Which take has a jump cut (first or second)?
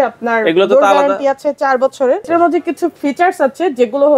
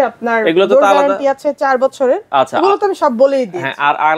first